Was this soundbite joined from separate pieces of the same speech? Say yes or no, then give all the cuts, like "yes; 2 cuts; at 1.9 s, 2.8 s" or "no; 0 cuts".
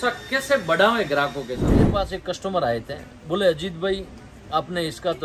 yes; 1 cut; at 2.0 s